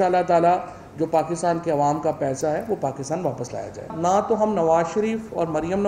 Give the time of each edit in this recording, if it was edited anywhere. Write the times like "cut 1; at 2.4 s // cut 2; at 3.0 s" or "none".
cut 1; at 3.8 s